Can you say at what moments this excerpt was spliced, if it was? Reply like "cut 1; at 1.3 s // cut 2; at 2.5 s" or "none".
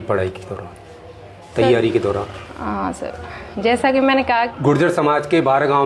cut 1; at 4.5 s